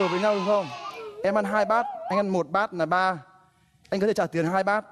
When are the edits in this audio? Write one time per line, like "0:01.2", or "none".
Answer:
none